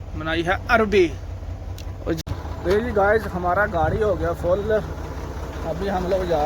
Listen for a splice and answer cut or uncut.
cut